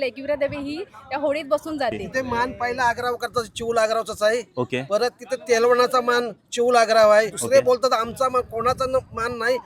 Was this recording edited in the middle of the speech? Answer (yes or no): yes